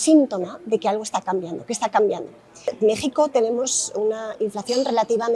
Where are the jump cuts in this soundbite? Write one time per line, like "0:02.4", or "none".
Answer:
0:02.7